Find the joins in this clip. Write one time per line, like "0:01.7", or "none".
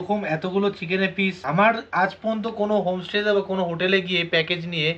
none